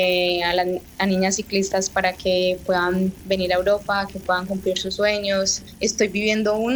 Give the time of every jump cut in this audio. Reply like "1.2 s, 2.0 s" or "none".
5.6 s